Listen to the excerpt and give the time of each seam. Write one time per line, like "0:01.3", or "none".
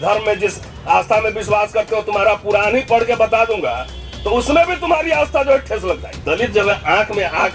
0:06.1